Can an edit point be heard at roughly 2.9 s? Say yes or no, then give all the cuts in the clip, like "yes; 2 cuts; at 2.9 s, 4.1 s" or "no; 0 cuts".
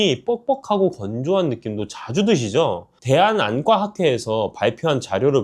yes; 1 cut; at 2.9 s